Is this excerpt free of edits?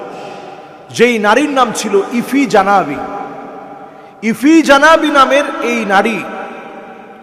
yes; 0 cuts

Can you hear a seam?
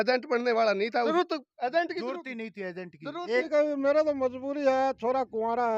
yes; 2 cuts; at 1.1 s, 3.5 s

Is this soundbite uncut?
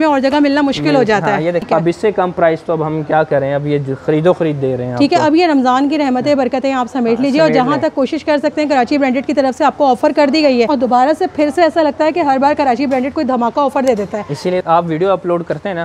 no; 3 cuts; at 1.2 s, 10.7 s, 14.6 s

